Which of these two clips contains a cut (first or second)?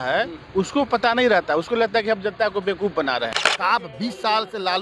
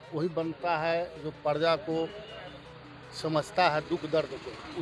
first